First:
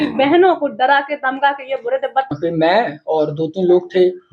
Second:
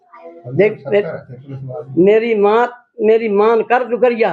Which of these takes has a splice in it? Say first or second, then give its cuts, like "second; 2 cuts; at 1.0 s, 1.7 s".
first; 1 cut; at 2.3 s